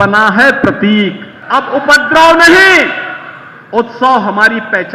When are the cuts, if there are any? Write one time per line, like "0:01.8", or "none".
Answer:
0:01.3